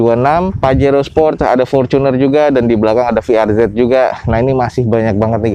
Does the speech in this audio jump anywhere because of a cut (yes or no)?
no